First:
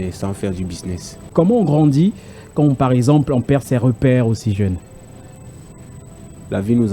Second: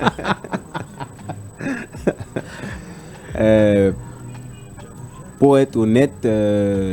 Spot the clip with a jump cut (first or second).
first